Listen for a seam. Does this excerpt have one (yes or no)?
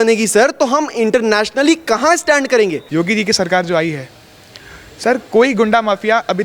yes